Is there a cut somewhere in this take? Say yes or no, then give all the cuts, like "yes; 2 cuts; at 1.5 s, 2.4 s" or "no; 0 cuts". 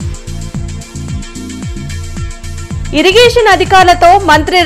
no; 0 cuts